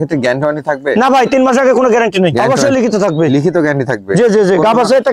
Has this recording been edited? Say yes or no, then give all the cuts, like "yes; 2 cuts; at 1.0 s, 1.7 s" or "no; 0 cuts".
yes; 1 cut; at 2.4 s